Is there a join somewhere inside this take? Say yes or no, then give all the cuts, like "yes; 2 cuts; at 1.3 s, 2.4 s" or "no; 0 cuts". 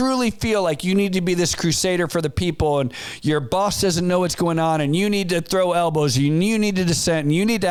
no; 0 cuts